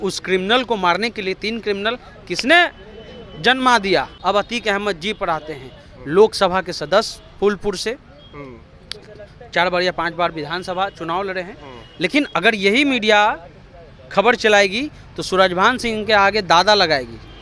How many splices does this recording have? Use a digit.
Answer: 1